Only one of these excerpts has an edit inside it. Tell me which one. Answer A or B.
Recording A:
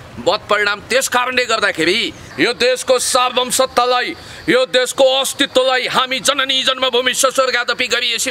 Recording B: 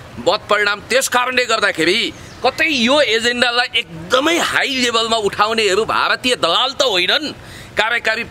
A